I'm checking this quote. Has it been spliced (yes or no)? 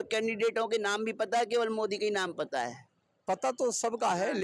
no